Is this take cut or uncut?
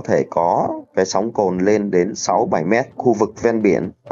cut